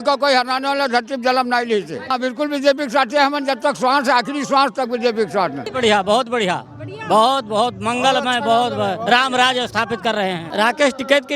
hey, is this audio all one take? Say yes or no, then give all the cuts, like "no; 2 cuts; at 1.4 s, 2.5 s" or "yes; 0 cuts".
no; 3 cuts; at 2.1 s, 5.7 s, 10.4 s